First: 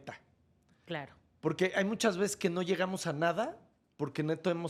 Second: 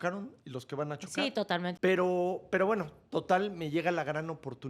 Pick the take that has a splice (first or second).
second